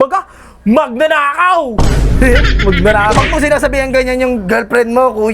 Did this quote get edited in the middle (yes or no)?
no